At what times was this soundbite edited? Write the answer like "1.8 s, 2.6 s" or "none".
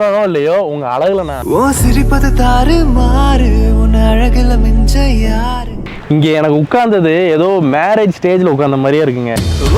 5.7 s